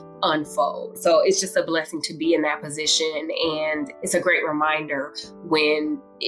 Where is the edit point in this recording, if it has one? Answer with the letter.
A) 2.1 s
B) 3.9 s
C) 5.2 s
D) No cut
B